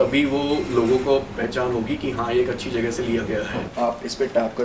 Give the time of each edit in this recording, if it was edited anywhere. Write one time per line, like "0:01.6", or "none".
0:03.7

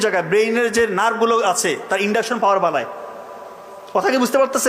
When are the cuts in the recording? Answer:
none

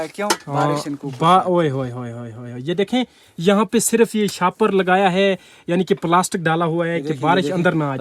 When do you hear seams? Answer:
none

